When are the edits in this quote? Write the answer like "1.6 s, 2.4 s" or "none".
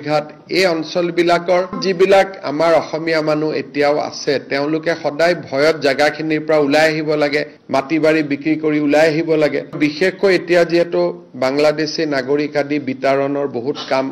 1.8 s, 9.7 s